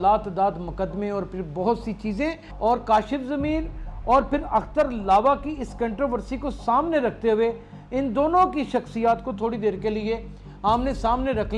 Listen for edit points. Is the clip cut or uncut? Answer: cut